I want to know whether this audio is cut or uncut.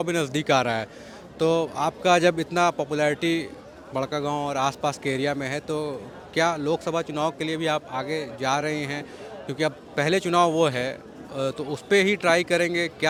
uncut